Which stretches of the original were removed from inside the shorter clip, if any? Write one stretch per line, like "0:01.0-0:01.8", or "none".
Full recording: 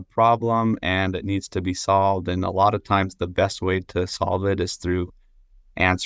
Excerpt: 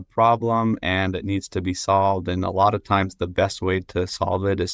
none